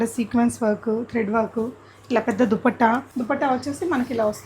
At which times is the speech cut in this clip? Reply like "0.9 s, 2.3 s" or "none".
3.1 s

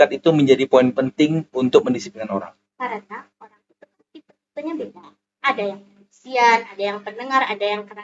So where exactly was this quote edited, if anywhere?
none

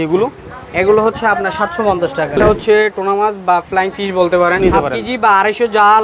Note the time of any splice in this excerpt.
2.4 s, 4.6 s

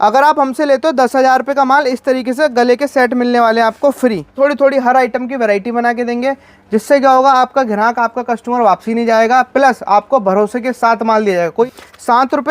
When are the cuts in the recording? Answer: 4.3 s, 11.7 s

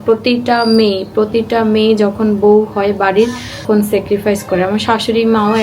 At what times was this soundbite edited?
3.6 s

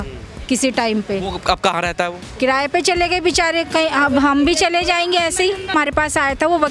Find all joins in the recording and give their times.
5.7 s

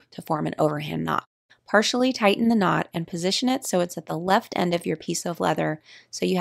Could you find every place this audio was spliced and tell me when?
none

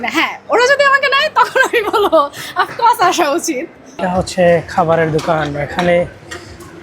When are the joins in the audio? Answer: 4.0 s

